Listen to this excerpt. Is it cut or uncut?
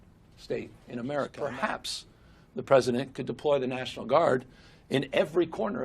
cut